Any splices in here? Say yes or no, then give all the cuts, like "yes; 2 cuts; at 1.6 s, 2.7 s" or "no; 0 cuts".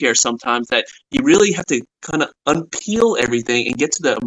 no; 0 cuts